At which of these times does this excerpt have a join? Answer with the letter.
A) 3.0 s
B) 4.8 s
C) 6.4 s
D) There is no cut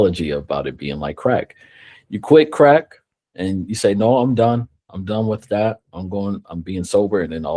D